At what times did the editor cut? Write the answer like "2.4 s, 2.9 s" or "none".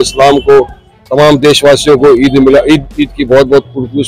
none